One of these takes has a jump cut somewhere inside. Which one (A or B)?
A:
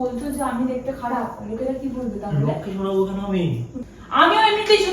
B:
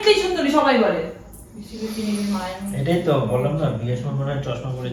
A